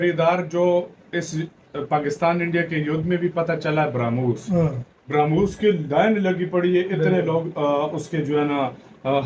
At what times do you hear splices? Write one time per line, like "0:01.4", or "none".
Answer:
none